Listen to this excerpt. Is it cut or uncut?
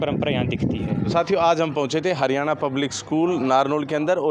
uncut